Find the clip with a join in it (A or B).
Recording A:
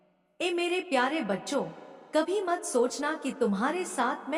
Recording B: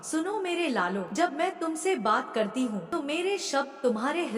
B